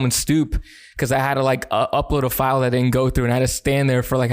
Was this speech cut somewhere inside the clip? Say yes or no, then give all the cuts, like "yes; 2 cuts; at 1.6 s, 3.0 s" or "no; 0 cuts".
no; 0 cuts